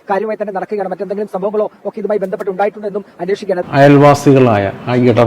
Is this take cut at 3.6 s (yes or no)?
yes